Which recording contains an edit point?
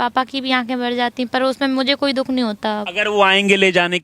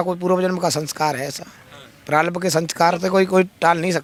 first; 1 cut; at 2.9 s

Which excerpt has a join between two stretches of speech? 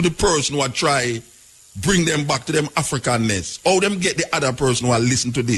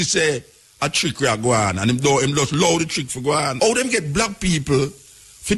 second; 1 cut; at 3.5 s

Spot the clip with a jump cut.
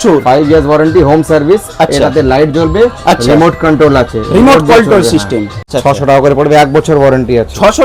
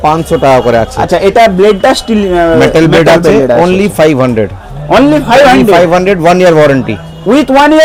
first; 1 cut; at 5.7 s

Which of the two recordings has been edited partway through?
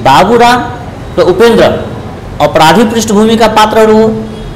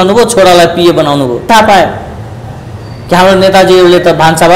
second; 1 cut; at 1.5 s

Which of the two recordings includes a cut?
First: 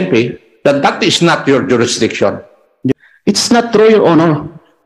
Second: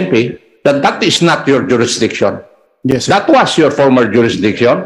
first; 1 cut; at 2.9 s

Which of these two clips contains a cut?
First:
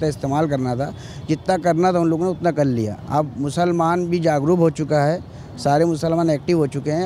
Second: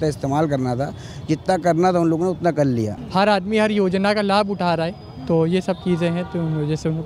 second; 1 cut; at 3.0 s

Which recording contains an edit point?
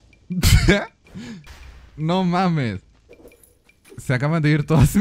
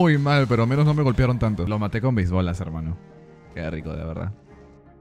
second; 1 cut; at 1.7 s

